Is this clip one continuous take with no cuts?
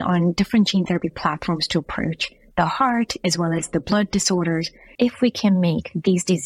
no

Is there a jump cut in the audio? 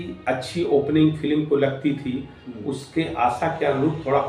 no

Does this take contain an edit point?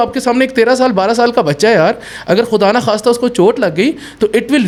no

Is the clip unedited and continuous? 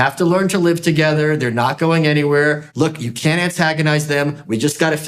no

